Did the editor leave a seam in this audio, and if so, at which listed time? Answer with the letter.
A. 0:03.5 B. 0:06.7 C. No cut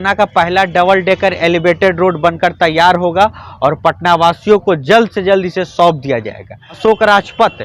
B